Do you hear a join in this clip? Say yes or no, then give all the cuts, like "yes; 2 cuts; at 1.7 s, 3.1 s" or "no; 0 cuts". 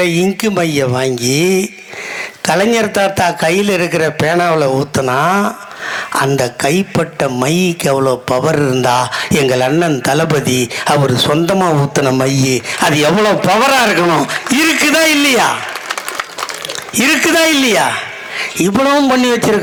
no; 0 cuts